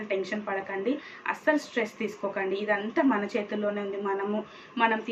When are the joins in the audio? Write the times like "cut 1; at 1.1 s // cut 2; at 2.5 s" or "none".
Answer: none